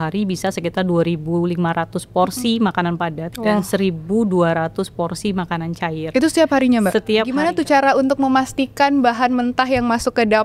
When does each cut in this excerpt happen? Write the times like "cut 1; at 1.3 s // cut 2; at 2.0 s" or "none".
cut 1; at 3.3 s // cut 2; at 7.4 s